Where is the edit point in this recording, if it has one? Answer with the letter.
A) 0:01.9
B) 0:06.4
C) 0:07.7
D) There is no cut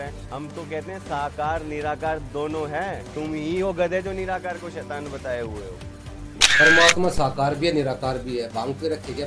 B